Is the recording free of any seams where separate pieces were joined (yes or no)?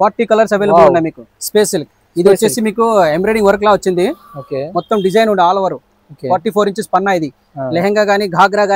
yes